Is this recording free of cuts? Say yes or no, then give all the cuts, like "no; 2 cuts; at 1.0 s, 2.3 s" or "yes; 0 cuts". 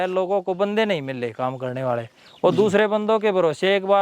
yes; 0 cuts